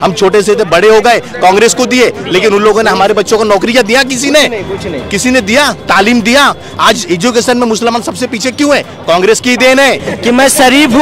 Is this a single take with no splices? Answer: no; 1 cut; at 10.1 s

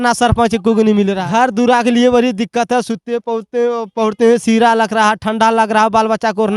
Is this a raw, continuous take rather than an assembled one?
no; 1 cut; at 1.1 s

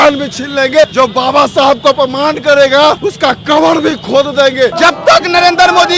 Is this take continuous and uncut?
no; 3 cuts; at 0.9 s, 3.1 s, 4.7 s

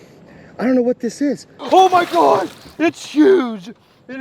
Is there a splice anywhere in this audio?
yes; 1 cut; at 1.5 s

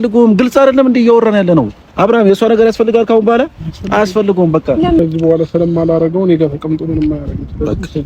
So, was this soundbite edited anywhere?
yes; 1 cut; at 5.0 s

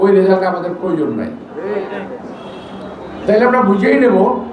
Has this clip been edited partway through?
no; 0 cuts

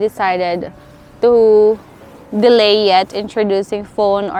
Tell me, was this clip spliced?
no; 0 cuts

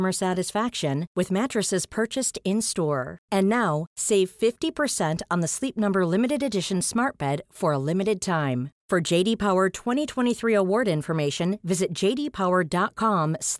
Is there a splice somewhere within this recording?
no; 0 cuts

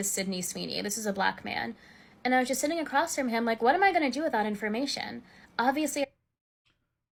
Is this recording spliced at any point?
no; 0 cuts

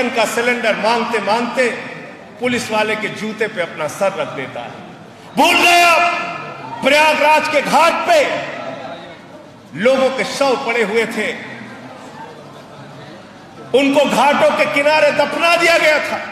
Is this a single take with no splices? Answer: yes; 0 cuts

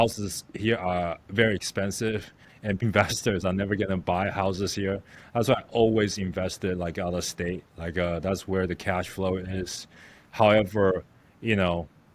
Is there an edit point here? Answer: yes; 1 cut; at 2.8 s

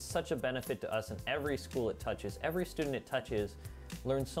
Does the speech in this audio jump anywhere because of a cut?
no; 0 cuts

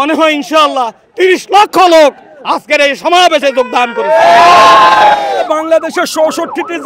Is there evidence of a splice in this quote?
yes; 1 cut; at 5.4 s

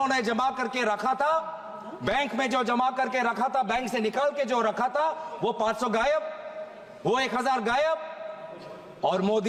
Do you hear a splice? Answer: no; 0 cuts

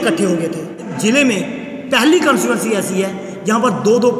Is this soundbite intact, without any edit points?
no; 1 cut; at 0.9 s

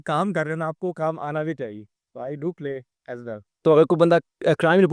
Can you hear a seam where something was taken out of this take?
no; 0 cuts

